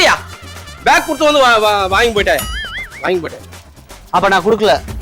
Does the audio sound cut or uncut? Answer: uncut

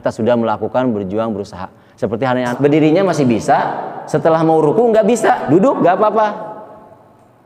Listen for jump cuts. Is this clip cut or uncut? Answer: cut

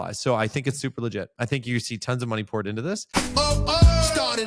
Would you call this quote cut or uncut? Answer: cut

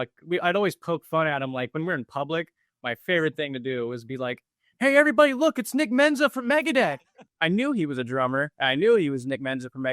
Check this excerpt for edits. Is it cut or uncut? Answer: cut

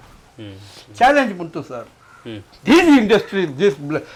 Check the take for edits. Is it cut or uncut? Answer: uncut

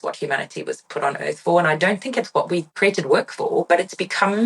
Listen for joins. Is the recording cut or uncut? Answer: cut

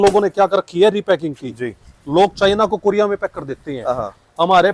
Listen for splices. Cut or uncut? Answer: uncut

